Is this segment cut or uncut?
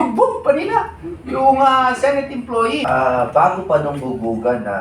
cut